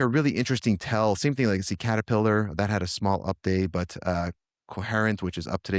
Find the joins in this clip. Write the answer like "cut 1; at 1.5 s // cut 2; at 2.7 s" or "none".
none